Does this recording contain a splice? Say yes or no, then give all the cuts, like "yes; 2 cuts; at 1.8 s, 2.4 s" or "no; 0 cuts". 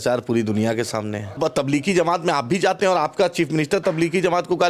yes; 1 cut; at 1.4 s